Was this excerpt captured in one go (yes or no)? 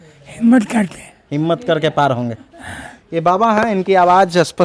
yes